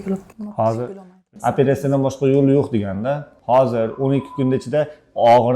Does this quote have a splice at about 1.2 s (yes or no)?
yes